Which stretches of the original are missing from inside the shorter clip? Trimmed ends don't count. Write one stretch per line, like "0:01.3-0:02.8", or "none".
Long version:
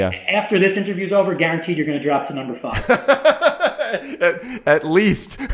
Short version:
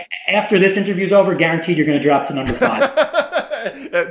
0:02.6-0:02.9